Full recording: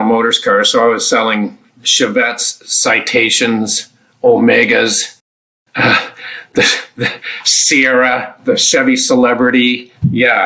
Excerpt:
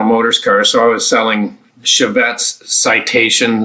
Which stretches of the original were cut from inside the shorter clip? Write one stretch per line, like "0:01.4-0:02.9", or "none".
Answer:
none